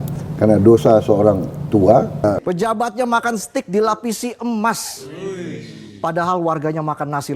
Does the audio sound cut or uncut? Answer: cut